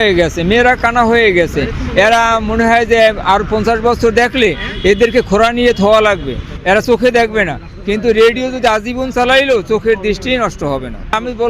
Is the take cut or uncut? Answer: uncut